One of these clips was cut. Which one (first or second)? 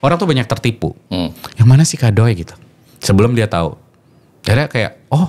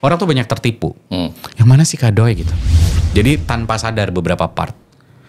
second